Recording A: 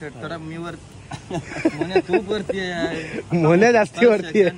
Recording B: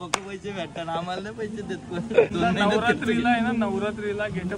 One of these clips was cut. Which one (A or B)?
B